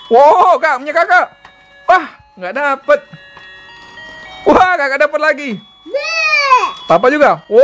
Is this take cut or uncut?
uncut